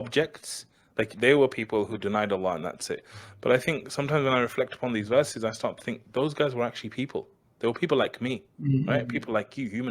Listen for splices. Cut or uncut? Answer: cut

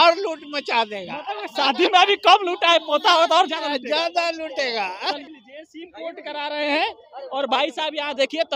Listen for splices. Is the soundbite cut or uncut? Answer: uncut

